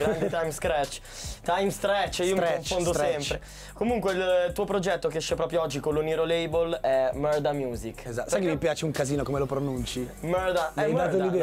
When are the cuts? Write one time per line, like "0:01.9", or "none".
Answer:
none

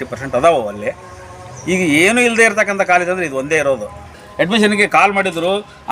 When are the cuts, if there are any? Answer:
0:04.2

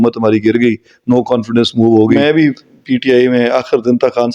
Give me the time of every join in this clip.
0:02.1

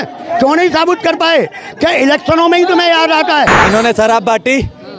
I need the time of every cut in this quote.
0:03.6

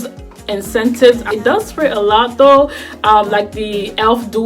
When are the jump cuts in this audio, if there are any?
0:01.3

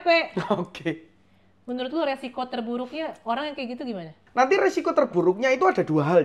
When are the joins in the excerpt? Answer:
0:04.2

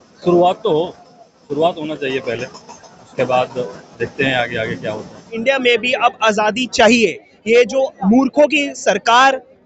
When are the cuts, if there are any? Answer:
0:05.3

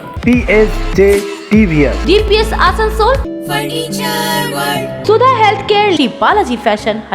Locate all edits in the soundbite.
0:03.2
0:05.0

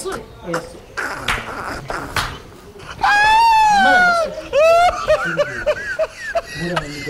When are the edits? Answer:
none

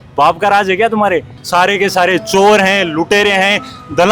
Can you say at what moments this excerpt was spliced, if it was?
0:01.4

